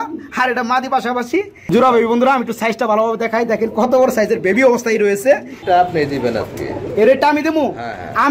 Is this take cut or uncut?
cut